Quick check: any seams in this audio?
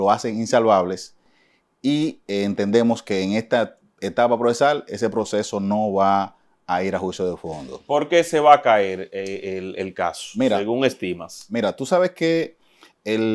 no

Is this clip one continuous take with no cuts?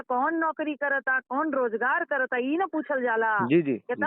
yes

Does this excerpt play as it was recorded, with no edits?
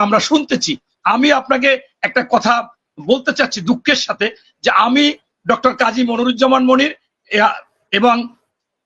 yes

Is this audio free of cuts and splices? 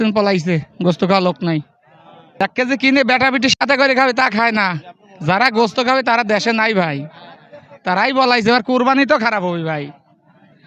no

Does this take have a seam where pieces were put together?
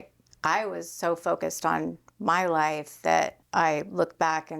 yes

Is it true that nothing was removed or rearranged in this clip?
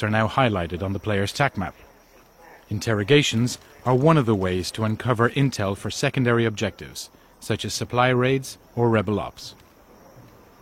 no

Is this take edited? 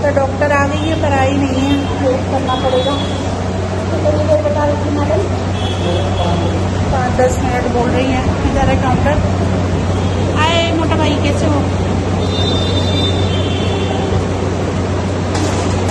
no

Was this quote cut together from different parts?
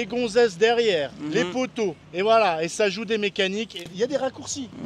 yes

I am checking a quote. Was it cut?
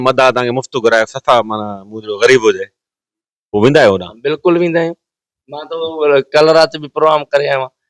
no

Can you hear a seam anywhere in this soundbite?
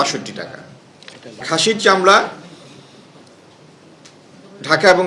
yes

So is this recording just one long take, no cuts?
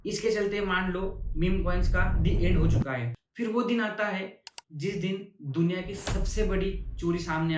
no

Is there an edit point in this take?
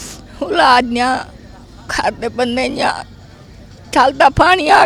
no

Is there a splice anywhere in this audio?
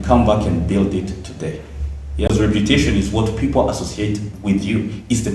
yes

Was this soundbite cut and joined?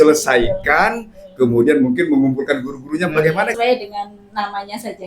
yes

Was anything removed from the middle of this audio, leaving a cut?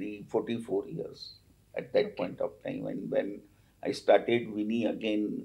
no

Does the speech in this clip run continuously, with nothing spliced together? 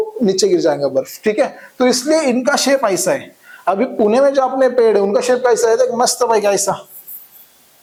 yes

